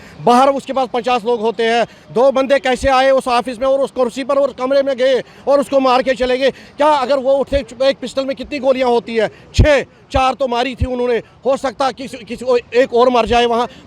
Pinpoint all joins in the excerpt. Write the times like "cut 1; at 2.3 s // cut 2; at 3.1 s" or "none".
none